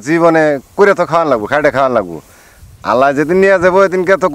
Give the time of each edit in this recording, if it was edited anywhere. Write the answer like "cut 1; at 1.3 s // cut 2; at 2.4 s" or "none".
none